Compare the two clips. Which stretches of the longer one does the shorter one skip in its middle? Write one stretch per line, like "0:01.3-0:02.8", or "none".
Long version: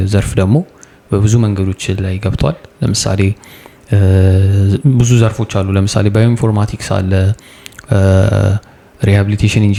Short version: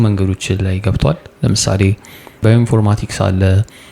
0:03.8-0:06.1

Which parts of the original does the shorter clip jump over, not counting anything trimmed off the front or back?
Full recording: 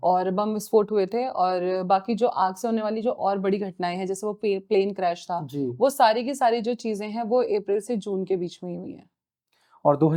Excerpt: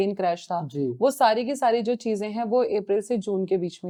none

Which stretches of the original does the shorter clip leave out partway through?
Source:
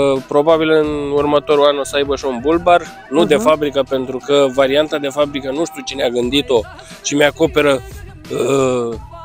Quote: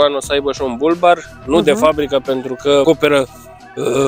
0:04.5-0:07.4

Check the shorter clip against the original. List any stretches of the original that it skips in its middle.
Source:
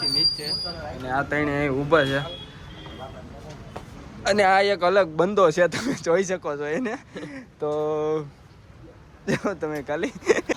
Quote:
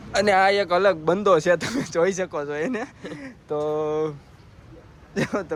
none

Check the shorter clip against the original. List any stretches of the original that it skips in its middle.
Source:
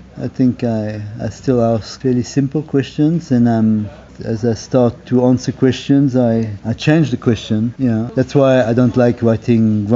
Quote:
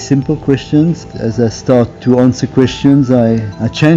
0:03.2-0:04.0

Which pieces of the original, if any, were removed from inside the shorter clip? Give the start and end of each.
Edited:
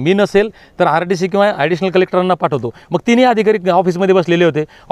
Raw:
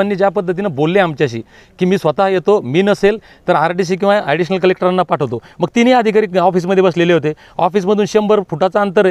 none

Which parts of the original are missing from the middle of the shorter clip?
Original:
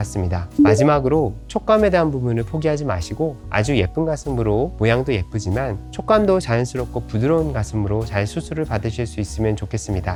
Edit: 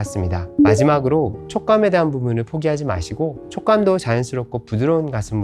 0:03.4-0:05.8

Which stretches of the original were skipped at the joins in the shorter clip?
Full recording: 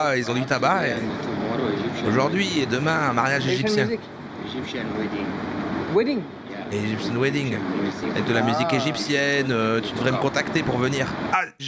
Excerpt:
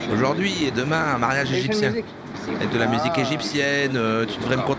0:04.4-0:08.0

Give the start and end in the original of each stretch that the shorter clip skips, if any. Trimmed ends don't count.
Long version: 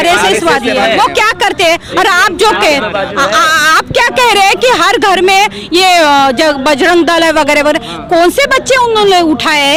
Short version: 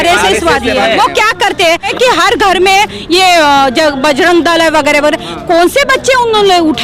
0:01.9-0:04.5

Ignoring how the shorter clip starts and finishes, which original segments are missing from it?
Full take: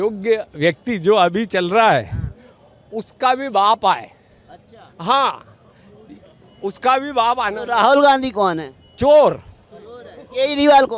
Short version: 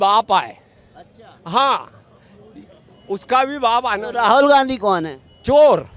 none

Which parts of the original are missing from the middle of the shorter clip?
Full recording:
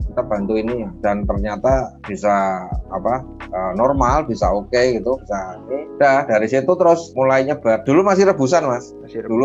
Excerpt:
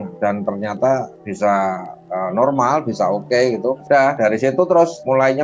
0:02.8-0:03.4
0:05.2-0:05.9

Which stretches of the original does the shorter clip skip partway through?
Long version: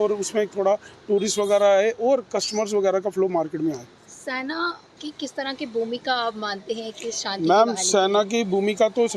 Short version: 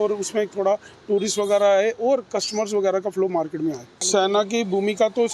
0:04.0-0:07.8

